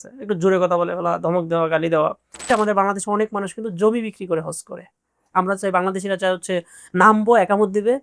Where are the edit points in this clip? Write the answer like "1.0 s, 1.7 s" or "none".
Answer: 2.5 s, 5.2 s